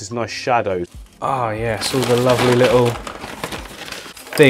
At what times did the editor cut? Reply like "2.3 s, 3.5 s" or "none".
0.9 s